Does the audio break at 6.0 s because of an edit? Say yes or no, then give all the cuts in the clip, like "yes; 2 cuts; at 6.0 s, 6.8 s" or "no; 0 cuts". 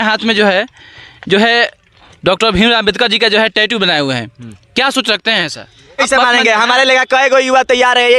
yes; 1 cut; at 6.0 s